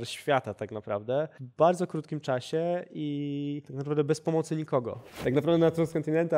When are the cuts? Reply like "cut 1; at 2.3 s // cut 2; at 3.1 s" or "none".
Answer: cut 1; at 1.4 s // cut 2; at 3.7 s // cut 3; at 5.0 s